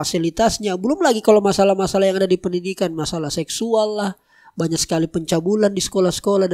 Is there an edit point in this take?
no; 0 cuts

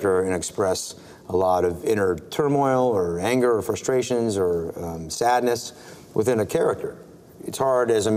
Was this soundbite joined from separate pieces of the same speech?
no; 0 cuts

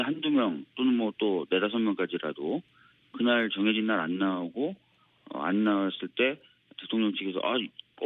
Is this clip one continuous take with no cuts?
yes; 0 cuts

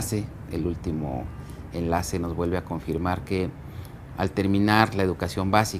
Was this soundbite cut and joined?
yes; 1 cut; at 3.2 s

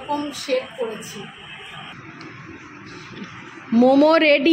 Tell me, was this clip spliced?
yes; 1 cut; at 1.9 s

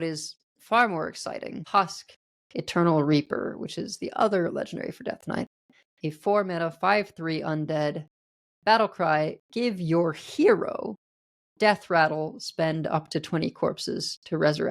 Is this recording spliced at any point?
yes; 1 cut; at 1.6 s

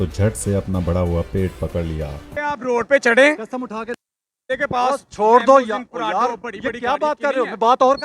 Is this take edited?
yes; 1 cut; at 2.3 s

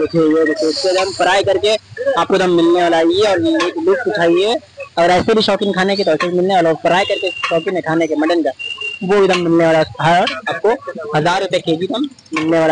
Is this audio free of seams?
yes; 0 cuts

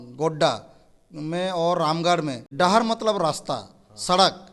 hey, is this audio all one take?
no; 1 cut; at 2.4 s

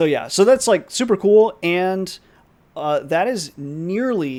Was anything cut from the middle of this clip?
no; 0 cuts

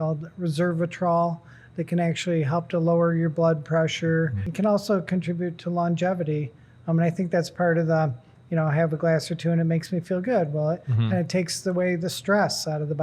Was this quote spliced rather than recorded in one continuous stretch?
yes; 1 cut; at 4.4 s

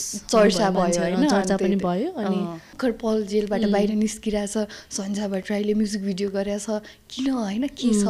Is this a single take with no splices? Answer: no; 1 cut; at 2.7 s

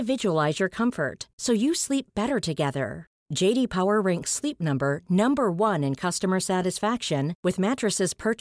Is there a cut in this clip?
no; 0 cuts

